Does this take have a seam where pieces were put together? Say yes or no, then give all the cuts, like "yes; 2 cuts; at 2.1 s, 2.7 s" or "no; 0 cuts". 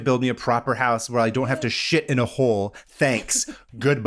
no; 0 cuts